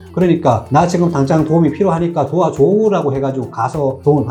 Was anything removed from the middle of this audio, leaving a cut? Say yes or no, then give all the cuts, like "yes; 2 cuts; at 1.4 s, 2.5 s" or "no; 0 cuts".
no; 0 cuts